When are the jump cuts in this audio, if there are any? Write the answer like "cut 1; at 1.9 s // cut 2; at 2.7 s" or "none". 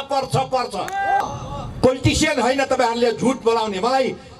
cut 1; at 1.2 s